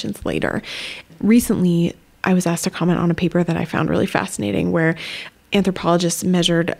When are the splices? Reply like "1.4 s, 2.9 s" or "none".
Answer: none